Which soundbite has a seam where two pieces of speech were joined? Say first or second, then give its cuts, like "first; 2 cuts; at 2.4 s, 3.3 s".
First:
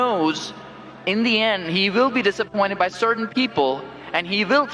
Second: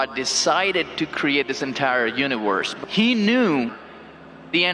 second; 1 cut; at 2.7 s